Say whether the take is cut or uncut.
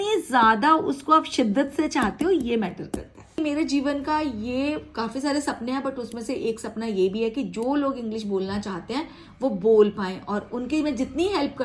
cut